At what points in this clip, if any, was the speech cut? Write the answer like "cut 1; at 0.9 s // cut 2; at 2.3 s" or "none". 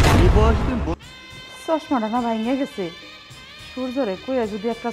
cut 1; at 1.0 s